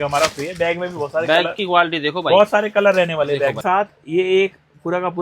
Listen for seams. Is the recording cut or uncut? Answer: cut